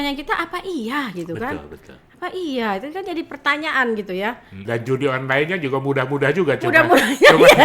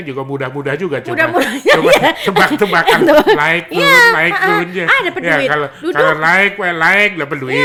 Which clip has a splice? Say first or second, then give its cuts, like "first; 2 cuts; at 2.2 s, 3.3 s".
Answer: first; 1 cut; at 4.5 s